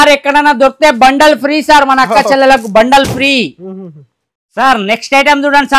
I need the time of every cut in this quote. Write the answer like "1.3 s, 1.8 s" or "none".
none